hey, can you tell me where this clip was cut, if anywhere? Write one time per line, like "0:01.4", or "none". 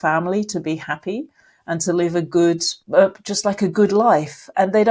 0:02.8